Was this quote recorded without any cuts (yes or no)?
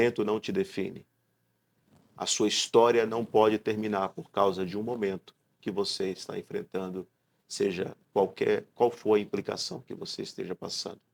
yes